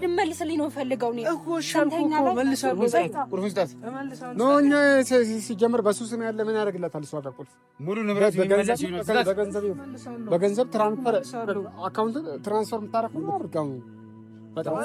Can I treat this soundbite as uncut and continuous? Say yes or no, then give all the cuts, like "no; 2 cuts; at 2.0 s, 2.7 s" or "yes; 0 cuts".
yes; 0 cuts